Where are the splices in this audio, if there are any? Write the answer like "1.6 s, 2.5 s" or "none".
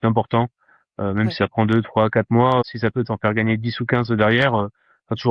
2.6 s